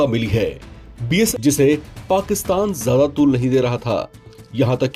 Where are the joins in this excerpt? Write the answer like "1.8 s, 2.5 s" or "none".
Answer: 1.3 s